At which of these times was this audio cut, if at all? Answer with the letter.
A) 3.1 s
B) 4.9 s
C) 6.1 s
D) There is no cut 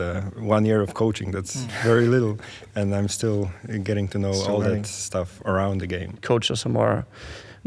C